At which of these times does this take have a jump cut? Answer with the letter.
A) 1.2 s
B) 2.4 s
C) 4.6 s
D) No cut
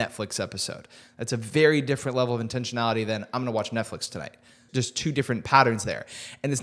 C